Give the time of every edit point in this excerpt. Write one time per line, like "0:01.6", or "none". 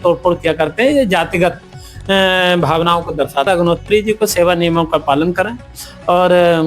0:03.5